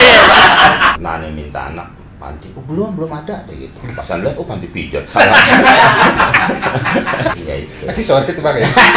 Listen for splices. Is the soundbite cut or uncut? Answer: cut